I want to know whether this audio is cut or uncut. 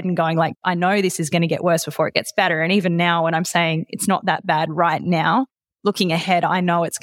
uncut